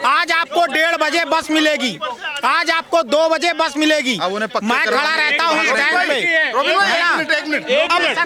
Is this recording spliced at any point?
no; 0 cuts

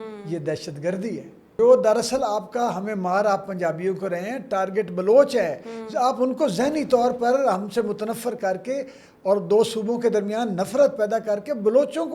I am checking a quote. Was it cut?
yes; 1 cut; at 1.6 s

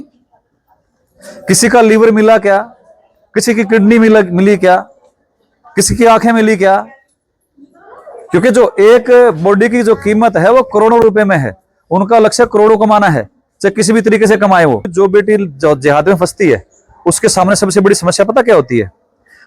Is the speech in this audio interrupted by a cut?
yes; 1 cut; at 14.9 s

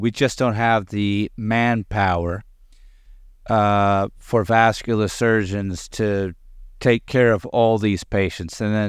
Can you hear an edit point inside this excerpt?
no; 0 cuts

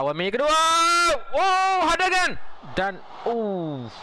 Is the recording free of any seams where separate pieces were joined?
yes; 0 cuts

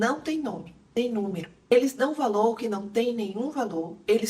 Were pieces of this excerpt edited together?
yes; 1 cut; at 1.5 s

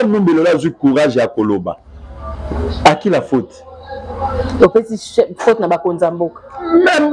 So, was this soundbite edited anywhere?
no; 0 cuts

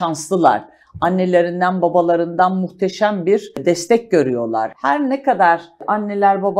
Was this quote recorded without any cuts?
no; 3 cuts; at 3.6 s, 4.7 s, 5.8 s

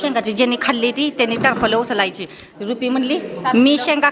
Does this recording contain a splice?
no; 0 cuts

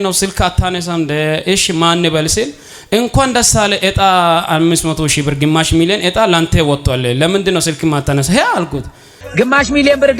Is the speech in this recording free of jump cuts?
yes; 0 cuts

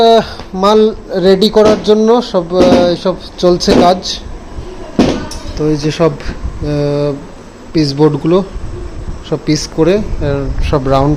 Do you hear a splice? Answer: no; 0 cuts

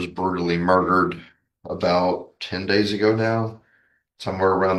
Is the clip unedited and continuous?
yes; 0 cuts

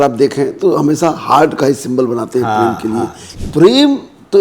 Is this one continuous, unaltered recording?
no; 1 cut; at 3.2 s

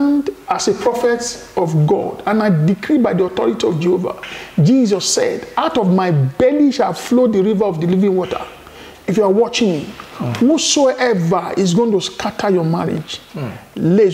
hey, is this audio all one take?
yes; 0 cuts

